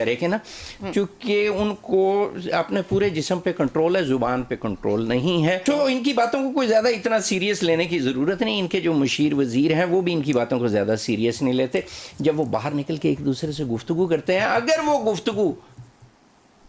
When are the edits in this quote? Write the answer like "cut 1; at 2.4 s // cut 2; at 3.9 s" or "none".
none